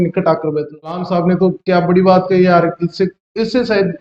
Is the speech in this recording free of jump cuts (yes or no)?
no